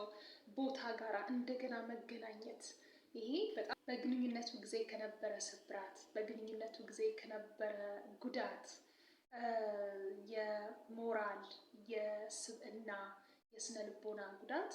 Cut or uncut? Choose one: cut